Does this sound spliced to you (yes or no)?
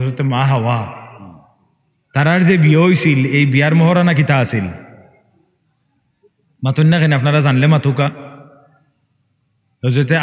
no